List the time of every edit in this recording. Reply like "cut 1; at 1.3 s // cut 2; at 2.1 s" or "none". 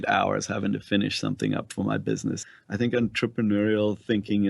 cut 1; at 2.4 s